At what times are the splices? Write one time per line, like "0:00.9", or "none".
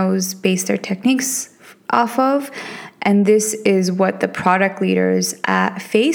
none